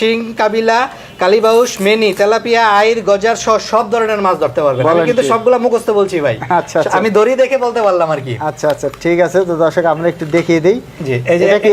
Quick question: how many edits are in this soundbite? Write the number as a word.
zero